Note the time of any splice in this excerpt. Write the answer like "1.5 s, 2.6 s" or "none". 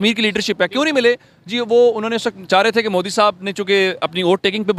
none